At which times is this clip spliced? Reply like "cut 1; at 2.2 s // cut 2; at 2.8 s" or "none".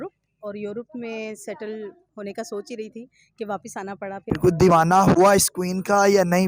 cut 1; at 4.2 s